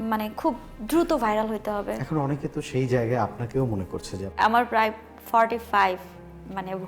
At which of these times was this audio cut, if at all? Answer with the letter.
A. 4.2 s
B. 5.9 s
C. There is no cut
A